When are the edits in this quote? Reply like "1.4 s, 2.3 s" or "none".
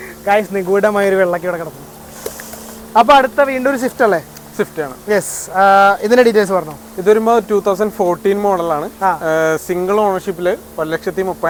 none

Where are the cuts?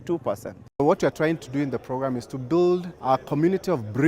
0.7 s, 2.9 s

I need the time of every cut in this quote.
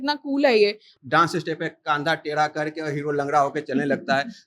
0.9 s

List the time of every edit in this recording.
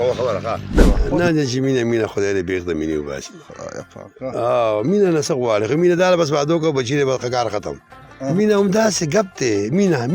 0.8 s, 8.3 s

